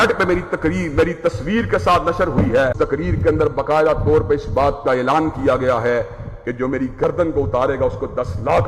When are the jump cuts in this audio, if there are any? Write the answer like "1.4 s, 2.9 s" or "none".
2.7 s